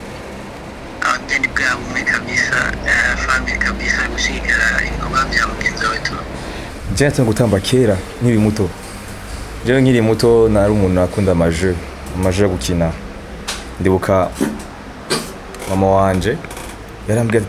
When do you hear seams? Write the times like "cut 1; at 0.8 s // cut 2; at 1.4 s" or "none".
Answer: cut 1; at 6.7 s